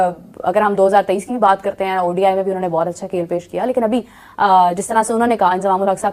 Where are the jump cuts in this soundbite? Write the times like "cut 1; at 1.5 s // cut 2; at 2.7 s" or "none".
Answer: cut 1; at 2.1 s